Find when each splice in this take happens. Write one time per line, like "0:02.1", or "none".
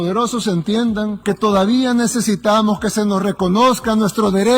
0:01.2

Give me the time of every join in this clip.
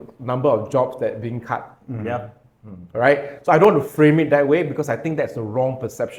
none

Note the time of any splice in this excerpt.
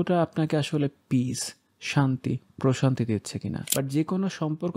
0:03.6

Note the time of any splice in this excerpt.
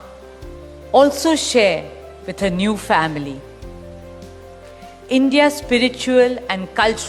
0:03.6
0:05.1

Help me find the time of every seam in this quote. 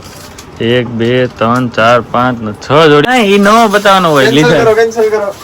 0:03.1

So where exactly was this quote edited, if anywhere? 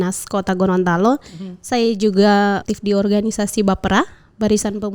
0:02.6

